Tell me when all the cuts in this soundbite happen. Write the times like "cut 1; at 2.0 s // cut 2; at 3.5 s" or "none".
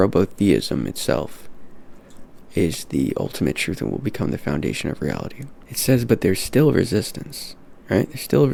none